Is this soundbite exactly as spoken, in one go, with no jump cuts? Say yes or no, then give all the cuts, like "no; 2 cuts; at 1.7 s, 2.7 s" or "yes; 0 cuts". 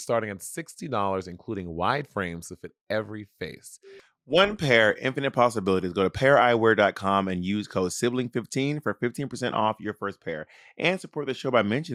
yes; 0 cuts